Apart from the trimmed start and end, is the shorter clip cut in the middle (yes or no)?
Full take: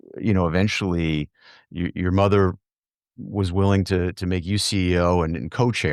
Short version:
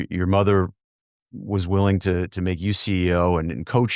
no